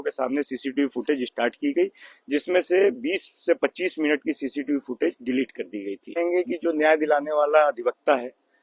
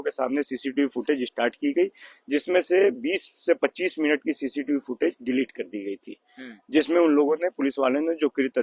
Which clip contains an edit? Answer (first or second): first